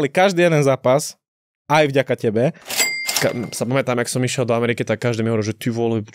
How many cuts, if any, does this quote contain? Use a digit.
1